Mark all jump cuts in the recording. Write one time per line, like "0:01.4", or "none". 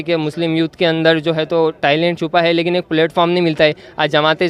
none